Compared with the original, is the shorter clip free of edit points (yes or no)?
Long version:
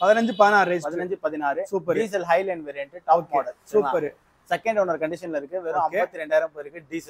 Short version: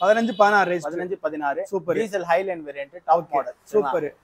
yes